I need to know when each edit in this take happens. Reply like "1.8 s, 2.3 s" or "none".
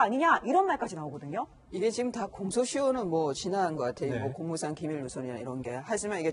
none